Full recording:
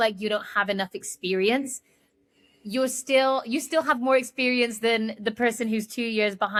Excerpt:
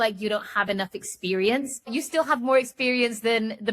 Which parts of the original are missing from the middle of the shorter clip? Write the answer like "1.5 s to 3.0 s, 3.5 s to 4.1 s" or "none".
1.9 s to 3.5 s